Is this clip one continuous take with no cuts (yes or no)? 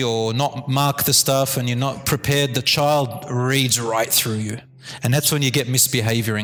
yes